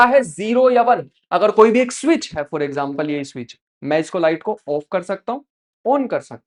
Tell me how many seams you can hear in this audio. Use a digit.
0